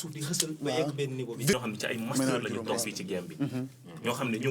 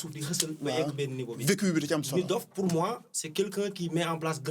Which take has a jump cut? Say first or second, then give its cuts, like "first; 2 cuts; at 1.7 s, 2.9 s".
first; 1 cut; at 1.5 s